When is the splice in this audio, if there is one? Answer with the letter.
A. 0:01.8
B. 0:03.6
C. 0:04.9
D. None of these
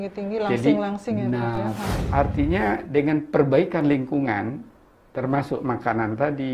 A